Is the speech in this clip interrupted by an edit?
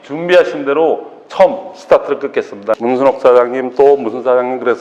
yes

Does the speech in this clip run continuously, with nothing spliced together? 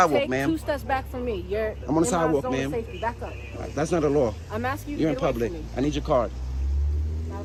yes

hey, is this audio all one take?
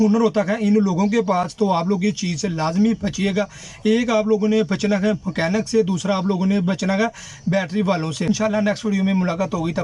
yes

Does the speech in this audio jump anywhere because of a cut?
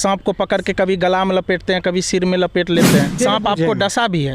yes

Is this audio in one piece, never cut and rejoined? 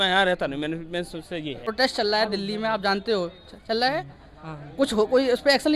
no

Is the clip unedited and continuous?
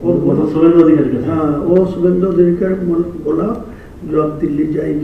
no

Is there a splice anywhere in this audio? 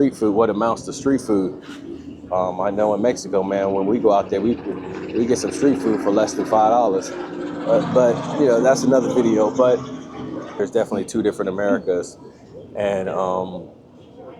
yes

